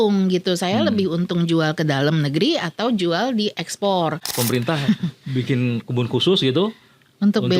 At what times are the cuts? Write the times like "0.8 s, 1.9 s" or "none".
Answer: 4.3 s